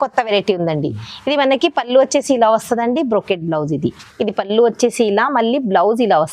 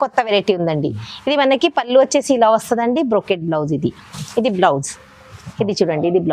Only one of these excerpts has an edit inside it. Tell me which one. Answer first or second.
first